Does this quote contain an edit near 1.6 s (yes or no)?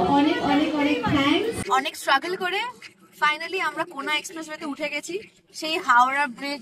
yes